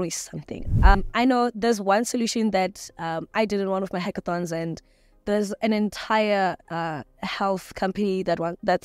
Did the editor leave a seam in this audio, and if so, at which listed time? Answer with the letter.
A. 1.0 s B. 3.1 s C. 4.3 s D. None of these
A